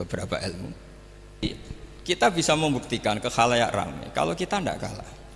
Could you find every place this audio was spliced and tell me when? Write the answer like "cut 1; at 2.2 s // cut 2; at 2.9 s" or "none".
cut 1; at 1.4 s